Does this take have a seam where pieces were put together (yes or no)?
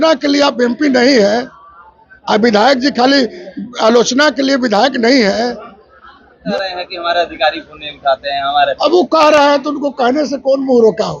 yes